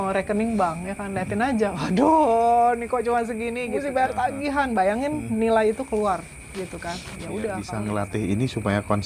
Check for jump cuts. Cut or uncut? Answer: cut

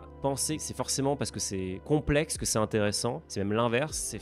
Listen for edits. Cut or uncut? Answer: uncut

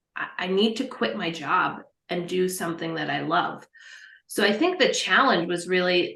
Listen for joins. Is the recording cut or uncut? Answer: uncut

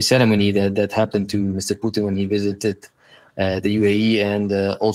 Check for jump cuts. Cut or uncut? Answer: uncut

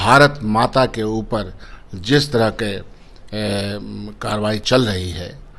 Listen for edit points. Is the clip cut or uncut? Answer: uncut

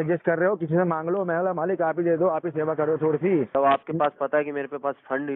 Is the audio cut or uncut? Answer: cut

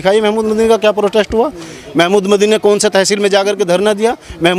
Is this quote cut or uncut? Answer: uncut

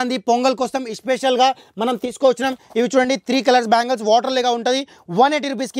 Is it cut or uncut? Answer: uncut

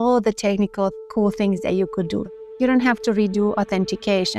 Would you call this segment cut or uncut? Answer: cut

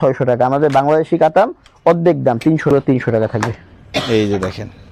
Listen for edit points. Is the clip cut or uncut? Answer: cut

